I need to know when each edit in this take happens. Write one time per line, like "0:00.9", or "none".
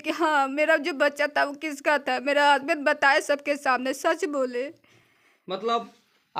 none